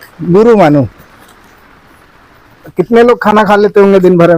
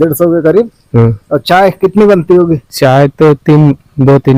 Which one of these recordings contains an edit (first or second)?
first